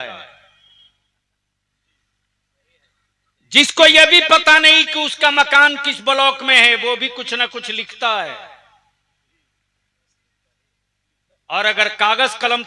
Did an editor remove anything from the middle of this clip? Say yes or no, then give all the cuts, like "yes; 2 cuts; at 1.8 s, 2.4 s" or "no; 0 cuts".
no; 0 cuts